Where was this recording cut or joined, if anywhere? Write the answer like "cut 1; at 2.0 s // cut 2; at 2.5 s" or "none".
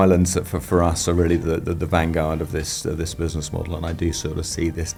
none